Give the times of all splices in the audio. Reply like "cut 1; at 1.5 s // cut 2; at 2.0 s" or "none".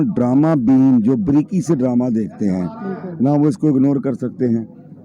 none